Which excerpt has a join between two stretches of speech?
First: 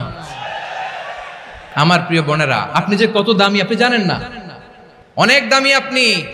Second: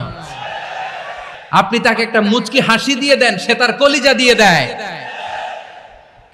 second; 1 cut; at 1.4 s

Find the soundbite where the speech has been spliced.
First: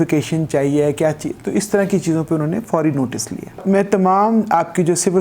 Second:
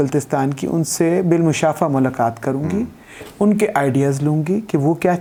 first; 1 cut; at 3.6 s

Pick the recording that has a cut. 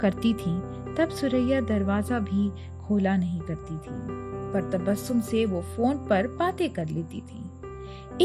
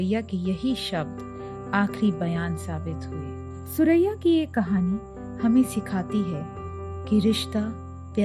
second; 1 cut; at 3.6 s

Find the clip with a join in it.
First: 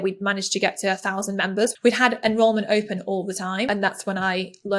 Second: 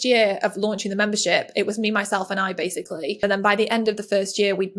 first; 1 cut; at 3.7 s

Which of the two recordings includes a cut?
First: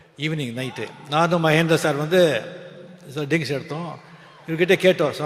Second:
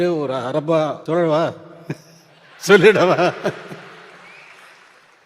second; 1 cut; at 1.0 s

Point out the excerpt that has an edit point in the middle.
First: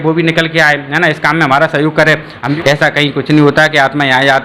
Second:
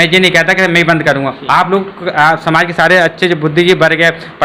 first; 1 cut; at 2.4 s

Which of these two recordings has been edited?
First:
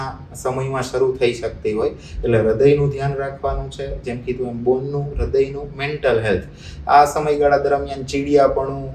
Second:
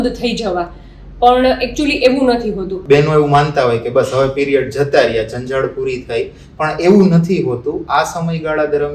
second; 1 cut; at 2.8 s

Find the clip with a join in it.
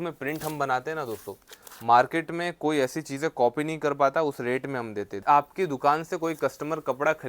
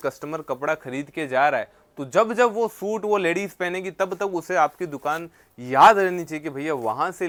first; 1 cut; at 5.2 s

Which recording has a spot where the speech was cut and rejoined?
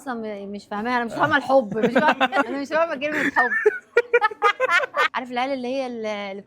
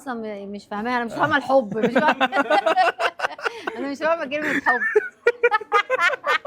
first; 2 cuts; at 2.5 s, 5.1 s

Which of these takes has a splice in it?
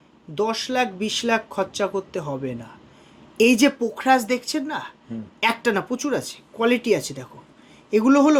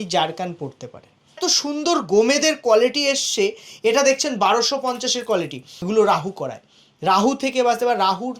second; 2 cuts; at 1.4 s, 5.7 s

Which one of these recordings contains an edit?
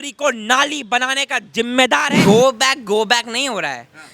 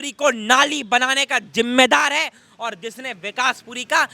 first; 1 cut; at 2.1 s

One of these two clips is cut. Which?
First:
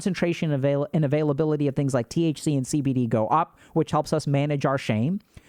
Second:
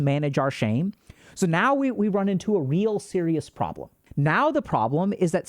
second; 1 cut; at 4.0 s

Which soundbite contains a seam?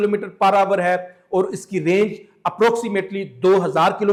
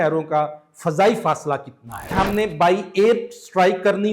second; 1 cut; at 2.1 s

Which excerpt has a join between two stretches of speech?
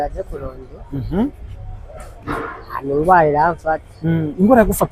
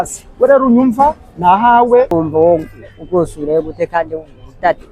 second; 1 cut; at 2.1 s

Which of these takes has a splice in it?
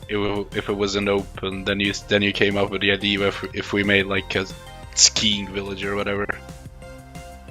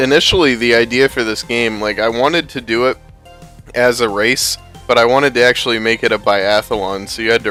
first; 1 cut; at 3.5 s

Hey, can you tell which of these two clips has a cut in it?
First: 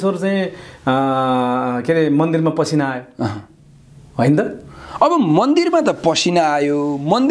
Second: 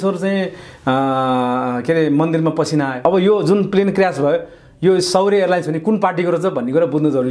second; 1 cut; at 3.0 s

